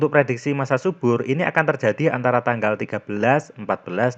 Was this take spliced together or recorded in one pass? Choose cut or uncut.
uncut